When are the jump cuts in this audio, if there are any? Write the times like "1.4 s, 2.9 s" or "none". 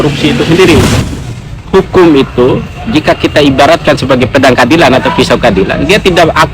1.0 s

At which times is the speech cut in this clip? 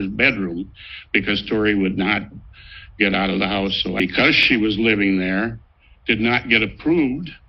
4.3 s

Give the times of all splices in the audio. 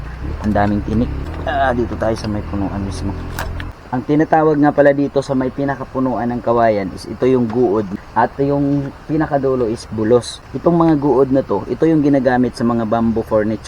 1.2 s, 3.8 s, 7.9 s, 10.4 s

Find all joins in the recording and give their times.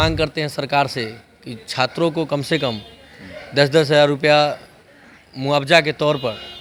none

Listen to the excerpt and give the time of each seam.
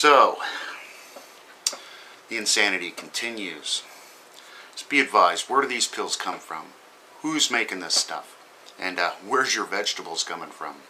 none

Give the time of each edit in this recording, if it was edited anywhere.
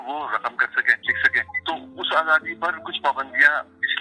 1.4 s, 2.9 s

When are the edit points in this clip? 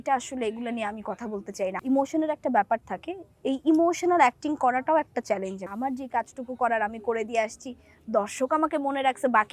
1.8 s, 5.7 s

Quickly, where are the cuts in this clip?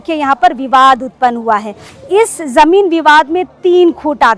1.8 s

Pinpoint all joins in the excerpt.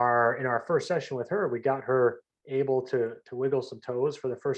none

